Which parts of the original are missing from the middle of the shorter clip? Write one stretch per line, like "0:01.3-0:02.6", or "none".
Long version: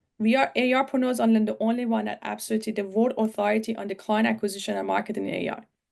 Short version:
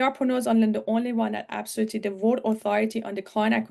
none